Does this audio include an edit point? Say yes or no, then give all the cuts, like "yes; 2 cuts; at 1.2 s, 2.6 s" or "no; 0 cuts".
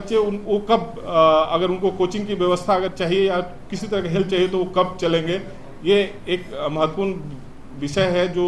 no; 0 cuts